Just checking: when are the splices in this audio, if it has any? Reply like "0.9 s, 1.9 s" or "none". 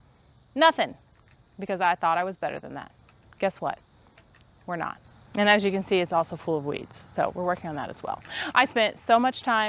none